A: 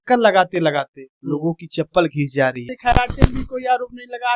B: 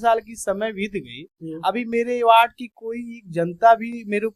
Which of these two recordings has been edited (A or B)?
A